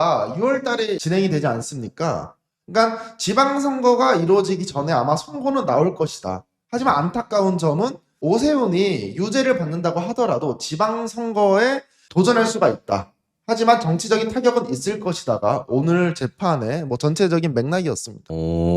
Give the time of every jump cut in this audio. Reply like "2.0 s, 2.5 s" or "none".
none